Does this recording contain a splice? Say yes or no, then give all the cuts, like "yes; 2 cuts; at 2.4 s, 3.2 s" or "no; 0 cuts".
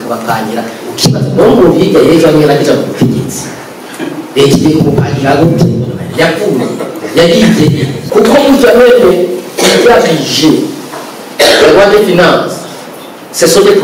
yes; 1 cut; at 8.0 s